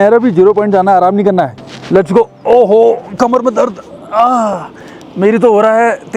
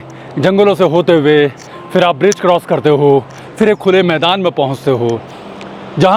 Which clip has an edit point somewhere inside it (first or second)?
first